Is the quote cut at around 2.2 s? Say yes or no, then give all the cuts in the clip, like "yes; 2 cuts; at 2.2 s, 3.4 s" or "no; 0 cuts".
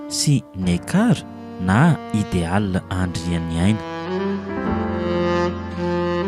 no; 1 cut; at 3.9 s